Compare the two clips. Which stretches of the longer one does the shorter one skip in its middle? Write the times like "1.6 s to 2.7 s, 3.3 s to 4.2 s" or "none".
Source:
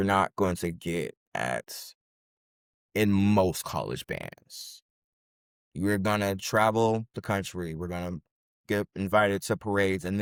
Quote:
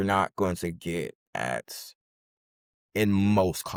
none